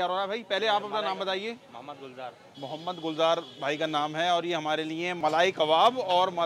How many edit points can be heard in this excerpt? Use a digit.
1